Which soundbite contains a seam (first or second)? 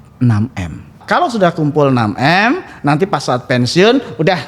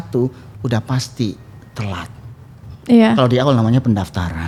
first